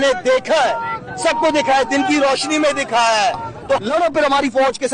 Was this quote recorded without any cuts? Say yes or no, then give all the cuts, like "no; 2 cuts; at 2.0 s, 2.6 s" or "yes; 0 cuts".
no; 1 cut; at 3.8 s